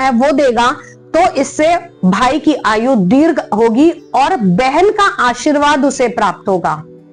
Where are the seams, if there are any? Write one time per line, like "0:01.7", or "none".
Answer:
none